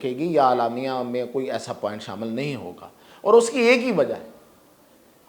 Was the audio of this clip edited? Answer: no; 0 cuts

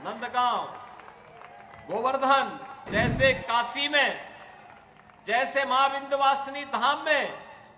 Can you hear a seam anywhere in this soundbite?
yes; 1 cut; at 2.8 s

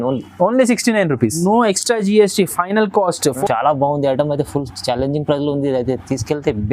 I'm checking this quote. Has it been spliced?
yes; 2 cuts; at 1.4 s, 3.4 s

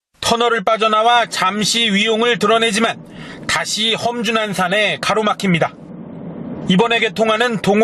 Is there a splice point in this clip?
no; 0 cuts

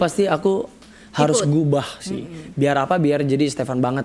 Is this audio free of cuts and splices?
yes; 0 cuts

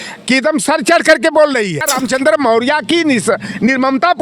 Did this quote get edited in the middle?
yes; 1 cut; at 1.8 s

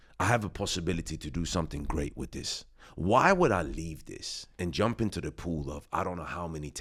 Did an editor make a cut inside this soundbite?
no; 0 cuts

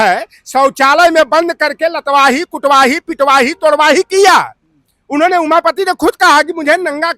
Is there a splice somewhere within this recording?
no; 0 cuts

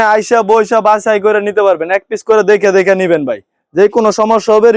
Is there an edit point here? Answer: no; 0 cuts

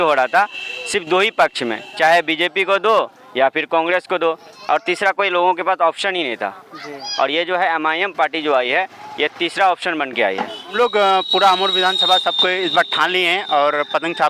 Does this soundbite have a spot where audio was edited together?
yes; 1 cut; at 10.7 s

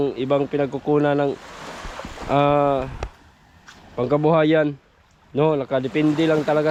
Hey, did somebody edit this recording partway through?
no; 0 cuts

